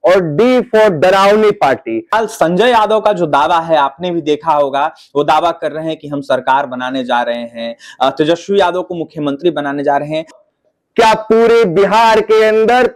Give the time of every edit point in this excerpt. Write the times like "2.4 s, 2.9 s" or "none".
2.1 s, 10.3 s